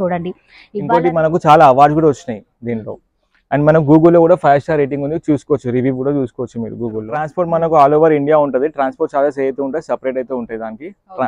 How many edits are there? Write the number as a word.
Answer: two